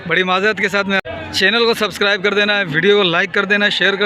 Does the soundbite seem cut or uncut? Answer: cut